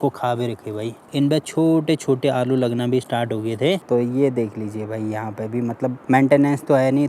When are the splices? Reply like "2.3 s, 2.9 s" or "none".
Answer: 1.0 s, 3.8 s, 6.0 s